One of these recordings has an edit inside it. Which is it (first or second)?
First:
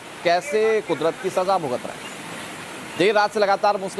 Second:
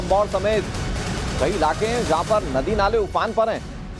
first